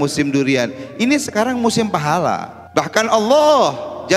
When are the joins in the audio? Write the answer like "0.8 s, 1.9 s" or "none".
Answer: 2.6 s